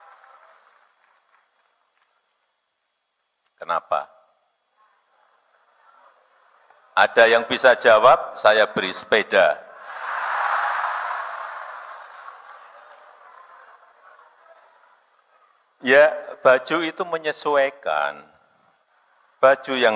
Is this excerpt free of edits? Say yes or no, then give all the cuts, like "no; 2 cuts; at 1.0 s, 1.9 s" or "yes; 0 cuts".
yes; 0 cuts